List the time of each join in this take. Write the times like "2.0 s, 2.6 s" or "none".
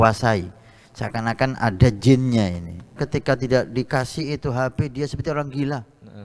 3.0 s